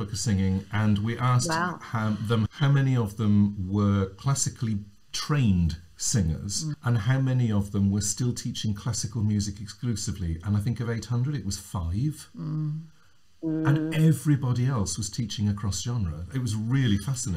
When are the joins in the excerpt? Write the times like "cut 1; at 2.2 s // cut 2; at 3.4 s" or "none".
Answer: cut 1; at 2.5 s // cut 2; at 6.8 s